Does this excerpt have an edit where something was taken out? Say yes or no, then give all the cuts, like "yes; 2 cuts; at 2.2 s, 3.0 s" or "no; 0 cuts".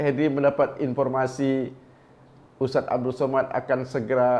no; 0 cuts